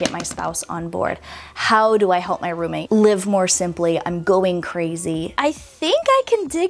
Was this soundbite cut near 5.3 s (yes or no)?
yes